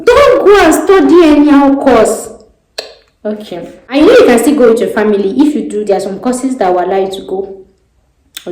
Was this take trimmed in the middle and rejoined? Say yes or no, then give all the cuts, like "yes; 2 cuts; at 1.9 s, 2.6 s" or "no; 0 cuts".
yes; 1 cut; at 3.8 s